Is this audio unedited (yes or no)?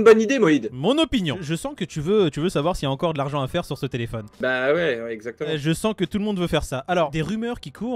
yes